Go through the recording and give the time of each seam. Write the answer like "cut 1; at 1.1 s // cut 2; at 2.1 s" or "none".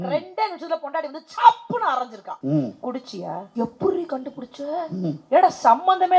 cut 1; at 2.2 s // cut 2; at 3.5 s // cut 3; at 5.2 s